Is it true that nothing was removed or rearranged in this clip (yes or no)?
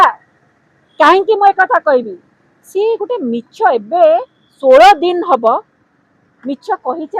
yes